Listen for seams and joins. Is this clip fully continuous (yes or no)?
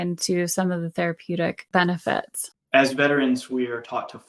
no